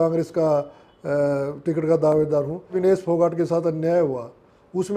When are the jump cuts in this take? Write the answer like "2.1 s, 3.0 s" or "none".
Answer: 2.8 s